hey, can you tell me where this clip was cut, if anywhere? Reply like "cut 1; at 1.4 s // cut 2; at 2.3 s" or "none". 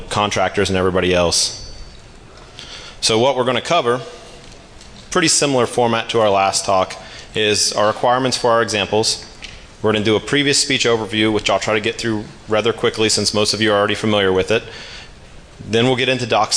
cut 1; at 9.8 s